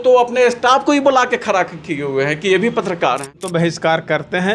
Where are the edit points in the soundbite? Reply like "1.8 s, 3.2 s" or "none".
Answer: 3.5 s